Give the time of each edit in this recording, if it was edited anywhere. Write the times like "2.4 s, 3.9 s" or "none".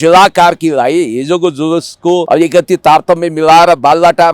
2.2 s